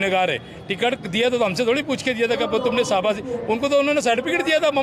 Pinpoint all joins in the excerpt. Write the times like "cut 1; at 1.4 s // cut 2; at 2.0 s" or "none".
none